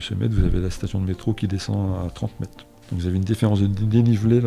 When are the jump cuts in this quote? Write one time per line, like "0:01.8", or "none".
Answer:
0:02.7